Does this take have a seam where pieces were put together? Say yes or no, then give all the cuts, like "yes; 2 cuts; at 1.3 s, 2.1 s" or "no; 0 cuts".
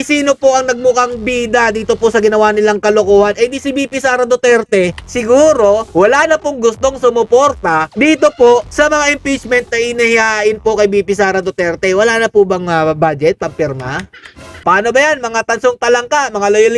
yes; 2 cuts; at 5.0 s, 14.5 s